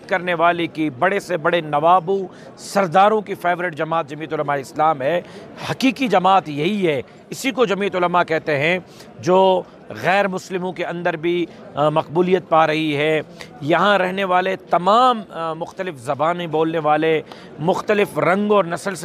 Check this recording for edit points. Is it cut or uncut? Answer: uncut